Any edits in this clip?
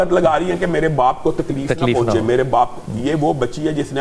no; 0 cuts

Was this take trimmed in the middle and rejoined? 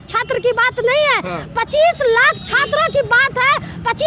no; 0 cuts

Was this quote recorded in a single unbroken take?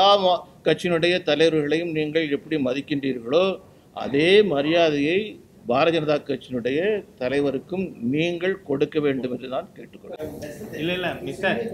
no; 1 cut; at 10.2 s

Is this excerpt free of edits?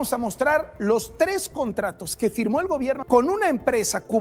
no; 1 cut; at 3.0 s

